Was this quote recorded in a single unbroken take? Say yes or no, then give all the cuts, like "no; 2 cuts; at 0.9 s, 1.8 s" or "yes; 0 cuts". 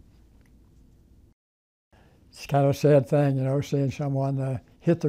no; 1 cut; at 1.5 s